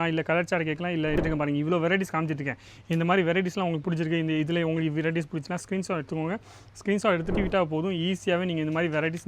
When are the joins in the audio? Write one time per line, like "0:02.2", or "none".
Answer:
0:01.2

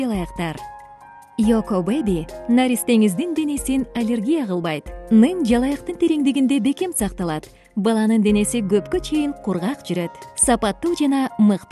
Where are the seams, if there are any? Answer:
none

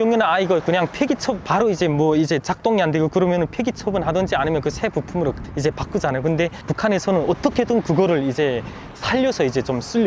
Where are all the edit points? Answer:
none

